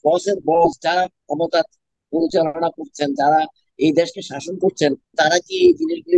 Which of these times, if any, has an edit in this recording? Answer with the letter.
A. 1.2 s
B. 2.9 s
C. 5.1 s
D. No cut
C